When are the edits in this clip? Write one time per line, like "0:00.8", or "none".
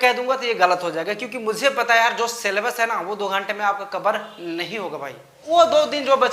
0:05.4